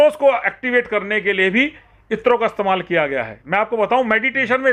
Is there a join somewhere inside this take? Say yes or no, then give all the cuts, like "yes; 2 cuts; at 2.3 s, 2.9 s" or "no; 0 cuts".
no; 0 cuts